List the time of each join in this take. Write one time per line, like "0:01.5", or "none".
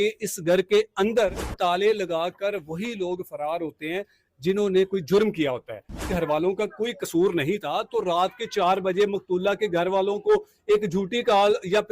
0:01.5
0:06.0